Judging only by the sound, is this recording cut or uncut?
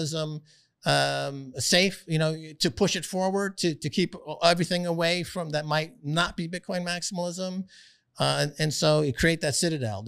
uncut